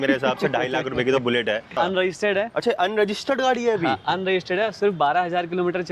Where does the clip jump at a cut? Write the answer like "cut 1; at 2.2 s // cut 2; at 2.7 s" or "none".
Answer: cut 1; at 1.8 s